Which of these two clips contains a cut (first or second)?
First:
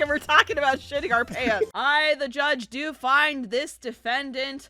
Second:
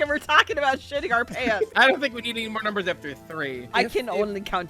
second